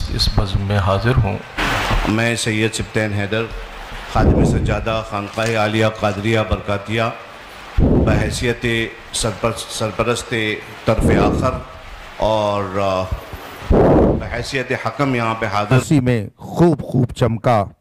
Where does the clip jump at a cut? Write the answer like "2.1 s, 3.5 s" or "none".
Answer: 1.4 s, 15.8 s